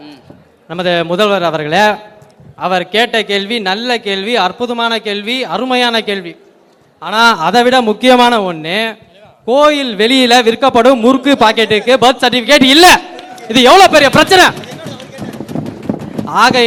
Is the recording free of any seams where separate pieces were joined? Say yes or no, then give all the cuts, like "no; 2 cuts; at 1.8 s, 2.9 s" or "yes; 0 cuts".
yes; 0 cuts